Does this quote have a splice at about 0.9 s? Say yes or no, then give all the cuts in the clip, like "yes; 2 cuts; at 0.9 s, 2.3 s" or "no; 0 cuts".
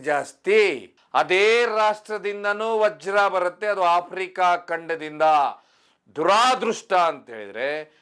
yes; 1 cut; at 0.9 s